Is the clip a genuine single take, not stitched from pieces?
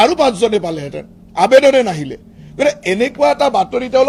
yes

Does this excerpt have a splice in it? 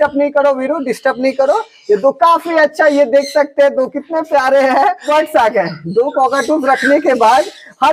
yes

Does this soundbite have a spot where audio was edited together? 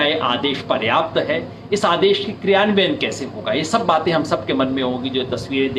no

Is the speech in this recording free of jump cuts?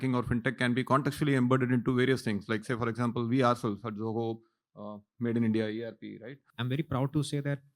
no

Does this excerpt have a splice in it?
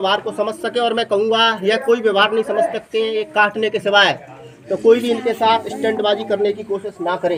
no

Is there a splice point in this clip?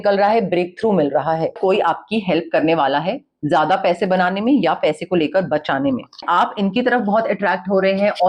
yes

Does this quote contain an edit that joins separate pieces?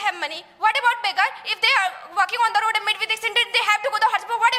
no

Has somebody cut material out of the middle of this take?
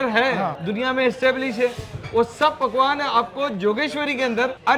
no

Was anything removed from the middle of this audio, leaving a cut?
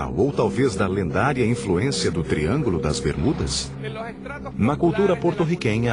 no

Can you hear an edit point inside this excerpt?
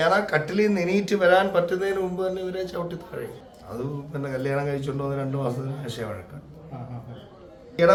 no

